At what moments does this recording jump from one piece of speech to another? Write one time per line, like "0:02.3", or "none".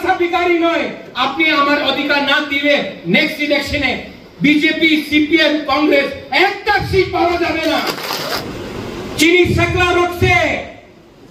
0:08.4